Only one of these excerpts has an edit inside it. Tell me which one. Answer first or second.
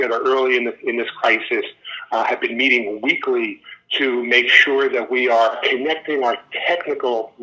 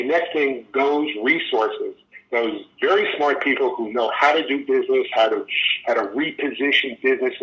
first